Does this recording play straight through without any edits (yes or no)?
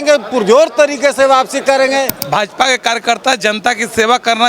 no